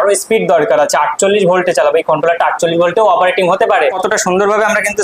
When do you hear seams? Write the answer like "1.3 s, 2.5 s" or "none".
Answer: 3.9 s